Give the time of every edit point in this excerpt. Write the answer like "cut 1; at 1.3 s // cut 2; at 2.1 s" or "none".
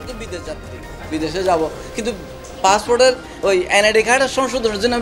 none